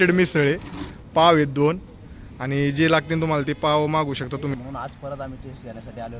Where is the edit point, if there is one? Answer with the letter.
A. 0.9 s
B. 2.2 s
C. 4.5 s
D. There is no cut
C